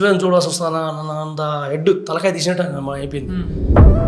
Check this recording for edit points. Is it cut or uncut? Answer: uncut